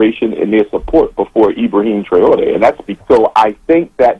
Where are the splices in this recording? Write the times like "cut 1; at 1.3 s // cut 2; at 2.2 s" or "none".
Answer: cut 1; at 2.9 s